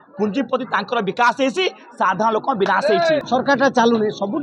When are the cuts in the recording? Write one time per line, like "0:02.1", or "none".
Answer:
none

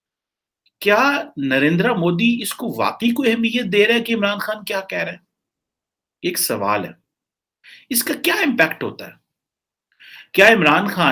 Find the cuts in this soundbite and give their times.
none

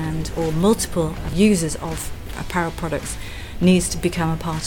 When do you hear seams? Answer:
0:01.2

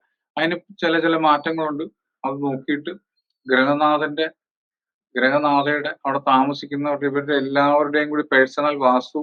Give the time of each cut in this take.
none

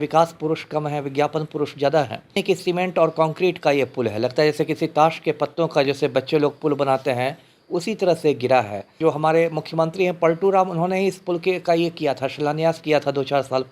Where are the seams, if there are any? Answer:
0:02.4
0:09.0

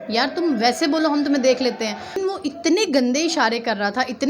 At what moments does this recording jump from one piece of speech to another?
0:02.2

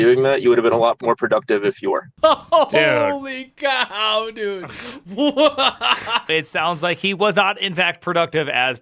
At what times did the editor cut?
0:06.3

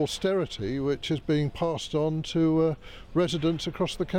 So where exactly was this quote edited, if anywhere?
none

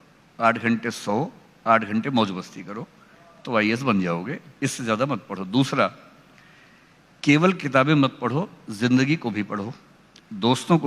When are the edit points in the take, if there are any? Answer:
none

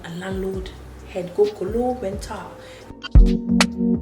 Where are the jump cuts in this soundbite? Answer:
0:02.9

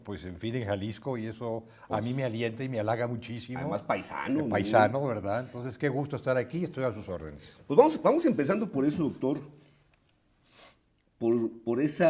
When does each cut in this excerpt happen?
0:02.6

